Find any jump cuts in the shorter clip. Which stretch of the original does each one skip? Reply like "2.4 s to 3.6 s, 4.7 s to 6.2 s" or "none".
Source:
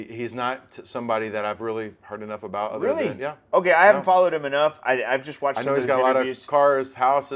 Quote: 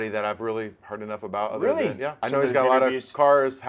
3.4 s to 5.6 s